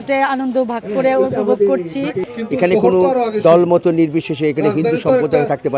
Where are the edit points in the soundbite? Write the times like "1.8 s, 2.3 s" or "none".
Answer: 2.3 s